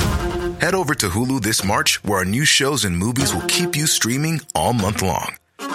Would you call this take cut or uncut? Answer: uncut